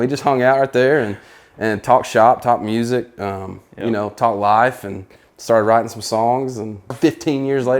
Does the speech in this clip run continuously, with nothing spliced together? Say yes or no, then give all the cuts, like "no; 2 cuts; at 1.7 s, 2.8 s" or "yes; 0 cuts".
no; 1 cut; at 6.9 s